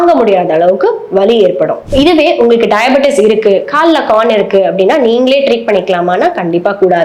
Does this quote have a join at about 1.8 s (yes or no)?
yes